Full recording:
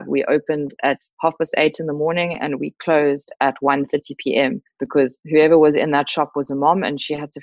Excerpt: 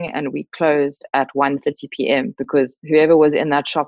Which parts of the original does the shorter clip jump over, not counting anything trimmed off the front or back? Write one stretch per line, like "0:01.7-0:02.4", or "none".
0:04.6-0:04.8